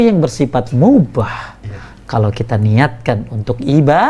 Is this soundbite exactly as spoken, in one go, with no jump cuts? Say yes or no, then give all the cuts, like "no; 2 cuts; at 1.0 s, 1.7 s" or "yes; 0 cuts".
yes; 0 cuts